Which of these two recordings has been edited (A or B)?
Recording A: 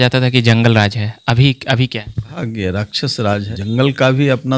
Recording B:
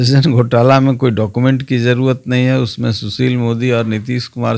A